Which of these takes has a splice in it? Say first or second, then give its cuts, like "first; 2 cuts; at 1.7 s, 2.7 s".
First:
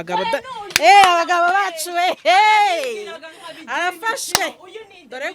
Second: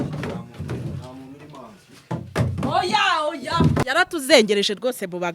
second; 1 cut; at 3.8 s